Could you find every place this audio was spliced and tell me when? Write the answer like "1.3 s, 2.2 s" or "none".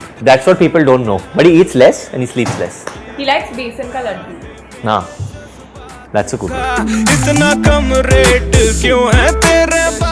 none

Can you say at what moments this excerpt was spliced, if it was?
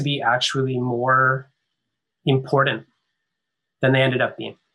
none

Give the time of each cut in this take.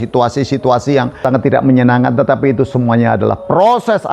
1.1 s

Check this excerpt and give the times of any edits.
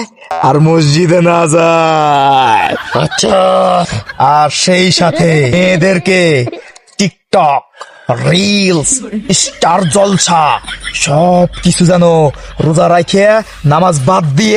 none

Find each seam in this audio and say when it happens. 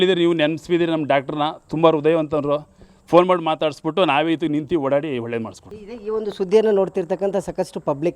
none

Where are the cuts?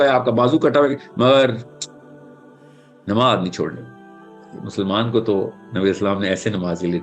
4.4 s

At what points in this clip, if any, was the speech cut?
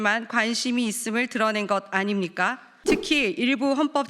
2.7 s

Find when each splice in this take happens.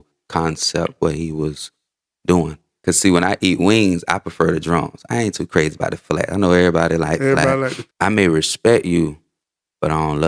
2.6 s, 7.8 s

